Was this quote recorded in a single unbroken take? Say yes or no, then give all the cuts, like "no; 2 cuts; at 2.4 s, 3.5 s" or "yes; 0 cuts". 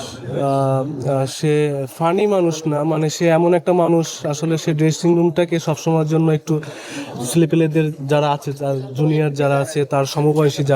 yes; 0 cuts